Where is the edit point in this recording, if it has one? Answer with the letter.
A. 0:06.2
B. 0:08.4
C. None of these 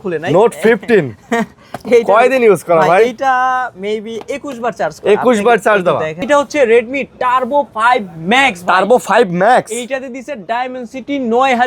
A